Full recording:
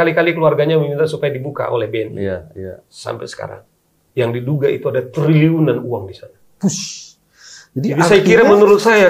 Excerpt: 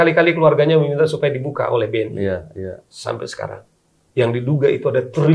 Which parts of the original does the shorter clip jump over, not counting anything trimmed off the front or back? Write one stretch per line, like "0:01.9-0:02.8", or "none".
none